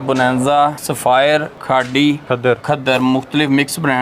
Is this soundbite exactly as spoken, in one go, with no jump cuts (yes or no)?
no